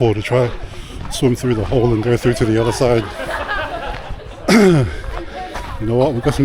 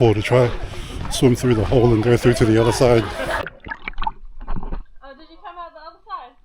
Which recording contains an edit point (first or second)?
second